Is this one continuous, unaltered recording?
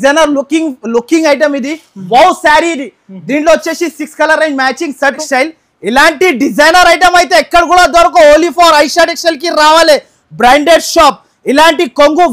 no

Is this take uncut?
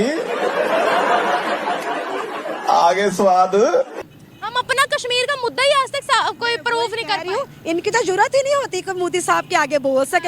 no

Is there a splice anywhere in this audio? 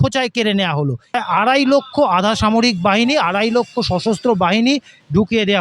yes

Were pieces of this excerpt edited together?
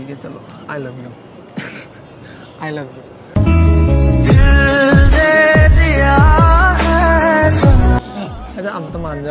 no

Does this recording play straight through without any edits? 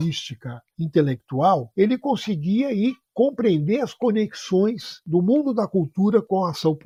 yes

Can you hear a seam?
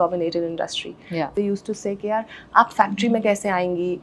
yes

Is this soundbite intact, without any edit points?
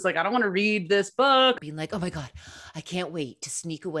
no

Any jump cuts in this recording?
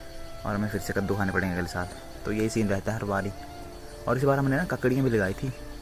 no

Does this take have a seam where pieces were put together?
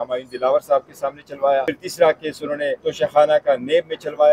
yes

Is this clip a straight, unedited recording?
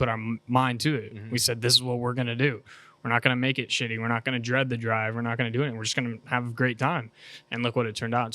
yes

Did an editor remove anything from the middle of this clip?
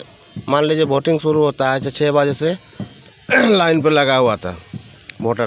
no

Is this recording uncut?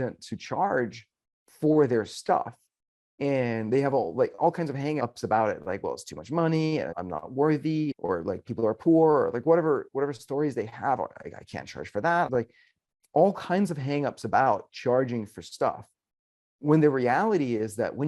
no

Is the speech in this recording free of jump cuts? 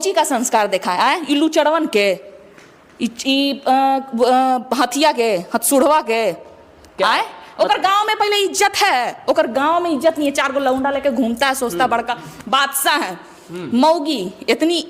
yes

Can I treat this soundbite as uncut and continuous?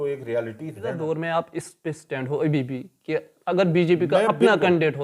no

